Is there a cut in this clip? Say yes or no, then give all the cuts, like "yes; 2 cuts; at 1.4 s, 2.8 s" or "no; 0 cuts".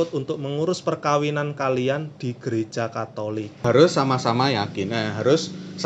yes; 1 cut; at 3.5 s